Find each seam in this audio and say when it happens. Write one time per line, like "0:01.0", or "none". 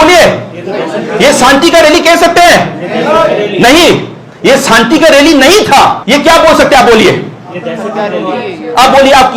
0:06.0